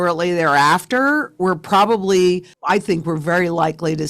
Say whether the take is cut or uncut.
cut